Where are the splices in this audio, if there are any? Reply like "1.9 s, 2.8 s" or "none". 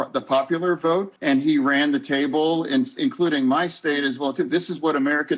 1.1 s